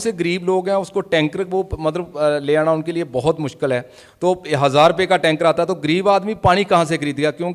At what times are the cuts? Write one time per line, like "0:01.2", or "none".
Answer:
none

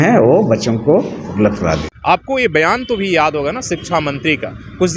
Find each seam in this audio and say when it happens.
0:01.9

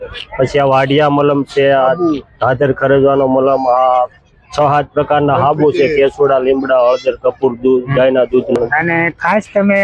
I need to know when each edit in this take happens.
0:08.6

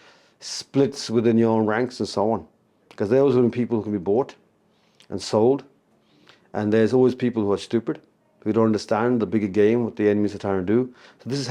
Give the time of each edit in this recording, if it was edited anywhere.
none

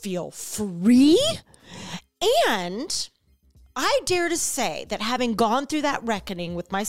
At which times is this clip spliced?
none

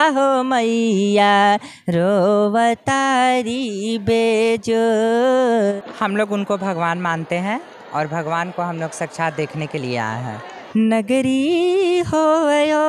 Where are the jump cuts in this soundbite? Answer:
0:05.8
0:10.5

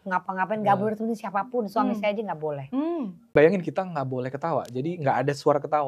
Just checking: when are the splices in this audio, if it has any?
0:03.3

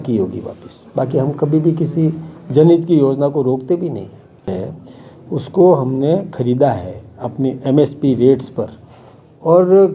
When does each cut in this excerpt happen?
0:04.5

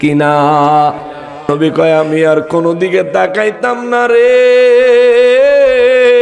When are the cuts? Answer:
0:01.5

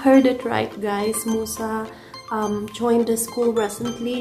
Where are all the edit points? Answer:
none

